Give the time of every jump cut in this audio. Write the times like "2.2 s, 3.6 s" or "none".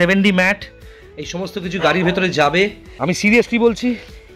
2.9 s